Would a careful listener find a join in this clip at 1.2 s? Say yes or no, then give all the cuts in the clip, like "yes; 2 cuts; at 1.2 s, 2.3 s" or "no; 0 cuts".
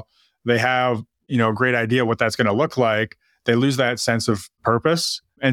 no; 0 cuts